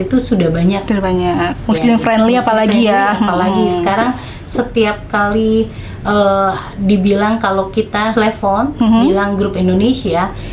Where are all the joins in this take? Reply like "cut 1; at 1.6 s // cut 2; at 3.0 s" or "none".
none